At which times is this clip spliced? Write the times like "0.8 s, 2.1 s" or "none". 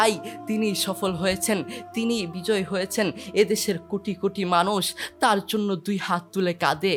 none